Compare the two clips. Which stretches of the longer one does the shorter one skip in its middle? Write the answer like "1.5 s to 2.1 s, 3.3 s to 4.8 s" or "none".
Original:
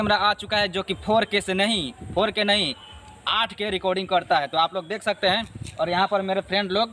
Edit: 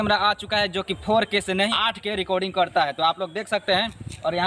1.7 s to 3.3 s